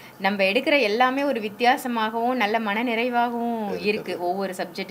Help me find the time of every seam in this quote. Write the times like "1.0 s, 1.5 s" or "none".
none